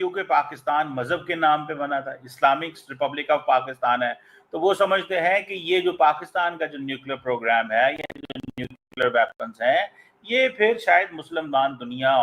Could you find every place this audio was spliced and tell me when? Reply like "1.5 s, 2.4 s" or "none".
none